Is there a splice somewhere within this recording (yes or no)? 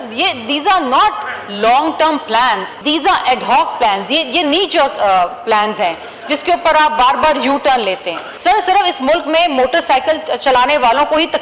yes